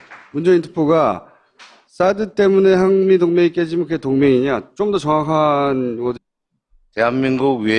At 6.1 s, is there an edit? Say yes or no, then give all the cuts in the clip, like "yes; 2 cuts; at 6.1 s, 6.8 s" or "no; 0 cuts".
no; 0 cuts